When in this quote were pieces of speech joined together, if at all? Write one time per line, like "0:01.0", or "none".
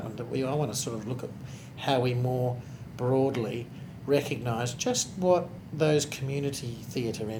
0:05.6